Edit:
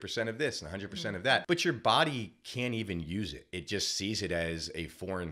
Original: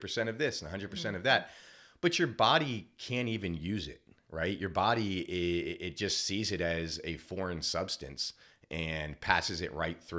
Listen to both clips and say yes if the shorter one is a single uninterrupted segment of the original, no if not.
no